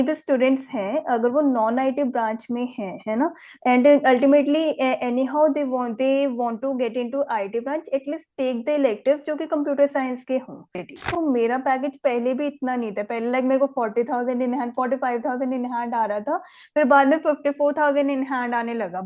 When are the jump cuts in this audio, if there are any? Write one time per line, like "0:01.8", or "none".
0:11.0